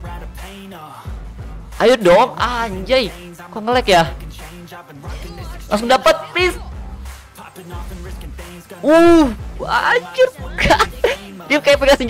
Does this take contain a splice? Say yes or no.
yes